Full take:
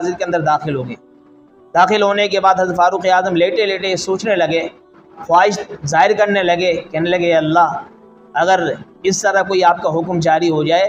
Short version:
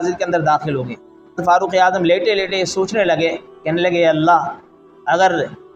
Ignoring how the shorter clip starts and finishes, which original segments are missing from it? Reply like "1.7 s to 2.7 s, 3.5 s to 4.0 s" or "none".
1.4 s to 2.7 s, 4.9 s to 6.9 s